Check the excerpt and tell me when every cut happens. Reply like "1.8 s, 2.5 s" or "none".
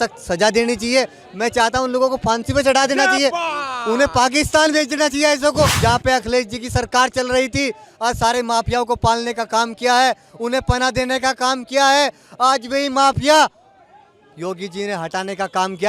5.8 s

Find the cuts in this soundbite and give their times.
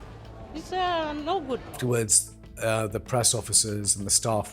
1.7 s

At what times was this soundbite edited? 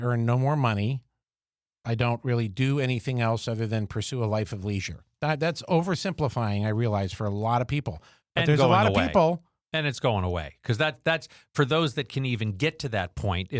none

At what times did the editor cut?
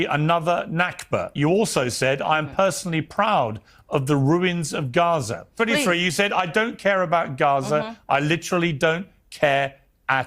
1.3 s, 5.5 s

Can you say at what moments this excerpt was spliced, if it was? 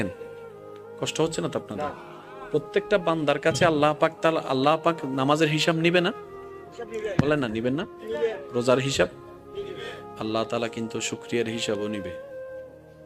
none

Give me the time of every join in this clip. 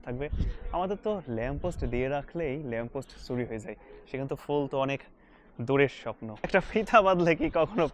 6.5 s

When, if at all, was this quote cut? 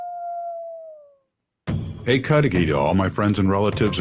1.4 s

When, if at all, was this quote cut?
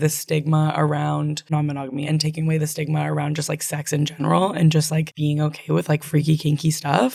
none

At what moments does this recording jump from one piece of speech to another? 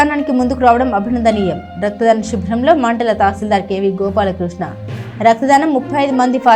none

